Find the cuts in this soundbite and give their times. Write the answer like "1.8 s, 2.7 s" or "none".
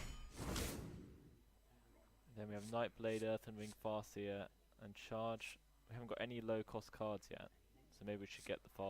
6.8 s